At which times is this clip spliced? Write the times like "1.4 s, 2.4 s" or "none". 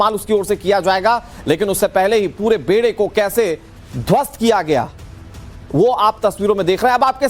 4.3 s